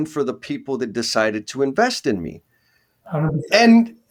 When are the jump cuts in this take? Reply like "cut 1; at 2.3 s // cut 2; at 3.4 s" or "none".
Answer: none